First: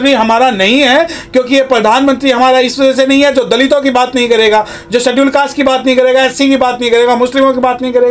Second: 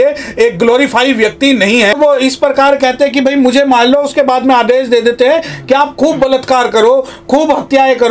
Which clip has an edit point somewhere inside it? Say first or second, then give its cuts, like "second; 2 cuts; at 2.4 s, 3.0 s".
second; 1 cut; at 1.9 s